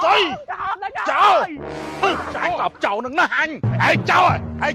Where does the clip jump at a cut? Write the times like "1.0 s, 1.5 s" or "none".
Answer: 3.6 s